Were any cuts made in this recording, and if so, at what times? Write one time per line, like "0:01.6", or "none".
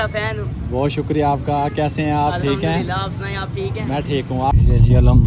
none